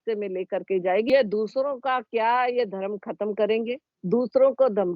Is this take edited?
yes; 1 cut; at 1.1 s

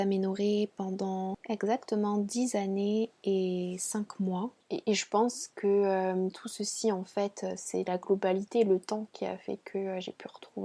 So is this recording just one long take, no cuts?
no; 2 cuts; at 1.4 s, 4.6 s

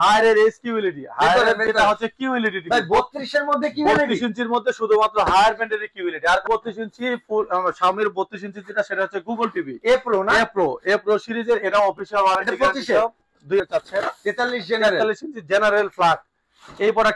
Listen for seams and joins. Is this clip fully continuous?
no; 2 cuts; at 6.4 s, 13.6 s

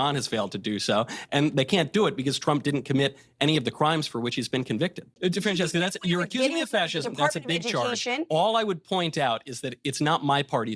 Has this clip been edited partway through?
yes; 1 cut; at 5.2 s

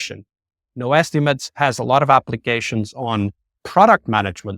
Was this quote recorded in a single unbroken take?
no; 1 cut; at 3.5 s

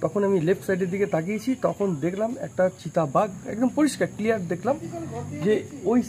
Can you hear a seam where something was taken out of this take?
no; 0 cuts

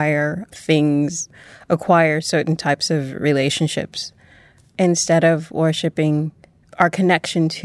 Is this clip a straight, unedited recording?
no; 2 cuts; at 1.3 s, 4.6 s

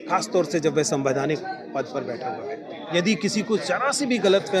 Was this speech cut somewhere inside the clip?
yes; 1 cut; at 2.7 s

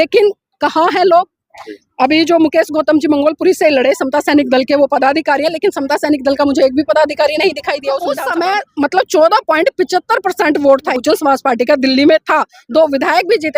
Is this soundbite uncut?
no; 2 cuts; at 8.1 s, 10.9 s

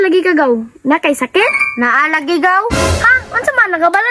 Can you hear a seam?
no; 0 cuts

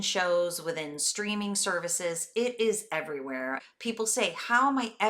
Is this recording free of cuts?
no; 1 cut; at 3.6 s

